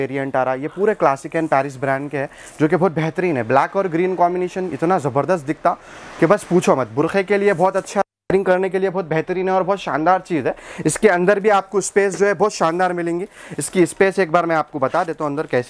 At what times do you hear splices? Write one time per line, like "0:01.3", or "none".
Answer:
none